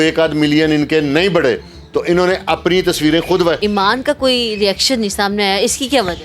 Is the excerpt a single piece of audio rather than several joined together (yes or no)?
no